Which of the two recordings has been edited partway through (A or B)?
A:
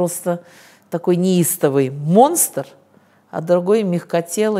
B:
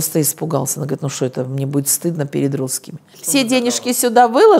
B